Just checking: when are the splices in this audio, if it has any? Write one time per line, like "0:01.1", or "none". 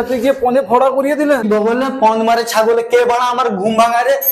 0:01.5